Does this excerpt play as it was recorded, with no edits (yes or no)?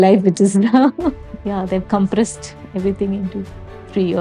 no